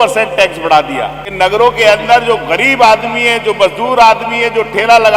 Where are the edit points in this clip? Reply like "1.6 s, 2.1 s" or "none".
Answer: 1.2 s